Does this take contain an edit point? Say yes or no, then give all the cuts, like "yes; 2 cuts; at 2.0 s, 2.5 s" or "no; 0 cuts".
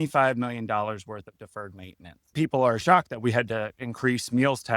yes; 1 cut; at 2.3 s